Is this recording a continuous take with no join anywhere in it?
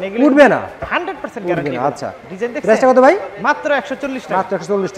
yes; 0 cuts

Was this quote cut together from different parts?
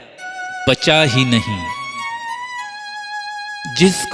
yes; 2 cuts; at 1.5 s, 3.3 s

